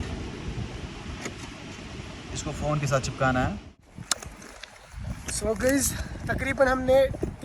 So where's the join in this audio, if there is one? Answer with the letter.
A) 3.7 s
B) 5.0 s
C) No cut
A